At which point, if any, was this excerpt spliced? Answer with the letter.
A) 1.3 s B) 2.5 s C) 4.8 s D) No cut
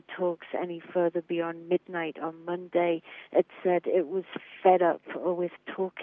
D